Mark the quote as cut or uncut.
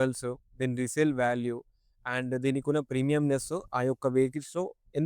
uncut